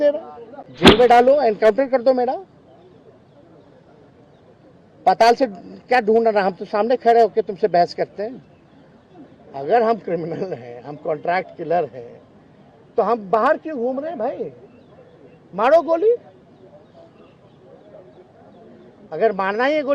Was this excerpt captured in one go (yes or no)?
no